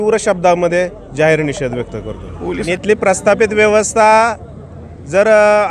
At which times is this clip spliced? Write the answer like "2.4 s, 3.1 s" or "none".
2.6 s